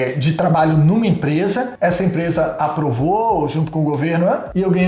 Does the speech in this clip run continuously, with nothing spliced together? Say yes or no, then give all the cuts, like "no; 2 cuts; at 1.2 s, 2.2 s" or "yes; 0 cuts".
yes; 0 cuts